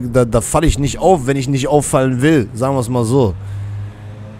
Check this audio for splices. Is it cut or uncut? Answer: uncut